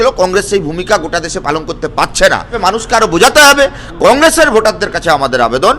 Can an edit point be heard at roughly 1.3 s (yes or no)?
no